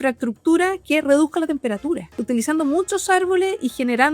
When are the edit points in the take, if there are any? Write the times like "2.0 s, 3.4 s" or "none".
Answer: 2.2 s